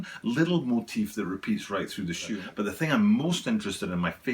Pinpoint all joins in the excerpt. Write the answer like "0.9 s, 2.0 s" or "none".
2.4 s